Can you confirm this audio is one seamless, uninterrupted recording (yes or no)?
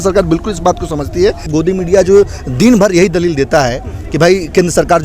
no